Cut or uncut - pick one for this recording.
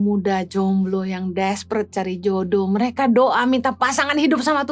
uncut